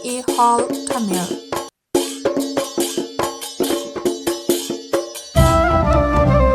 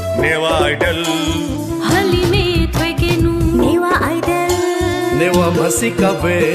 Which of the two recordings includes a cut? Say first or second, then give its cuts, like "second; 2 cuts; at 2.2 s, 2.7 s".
first; 1 cut; at 1.6 s